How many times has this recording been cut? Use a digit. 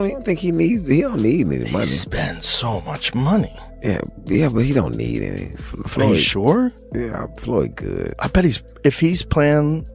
0